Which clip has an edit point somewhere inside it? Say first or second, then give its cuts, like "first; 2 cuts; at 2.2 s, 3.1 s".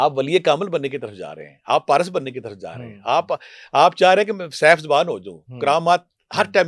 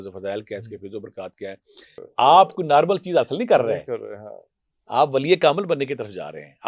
second; 1 cut; at 2.0 s